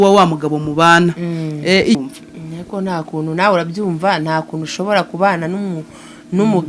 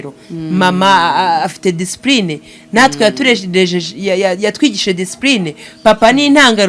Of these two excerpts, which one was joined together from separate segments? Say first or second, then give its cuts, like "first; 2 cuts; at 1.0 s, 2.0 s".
first; 1 cut; at 2.0 s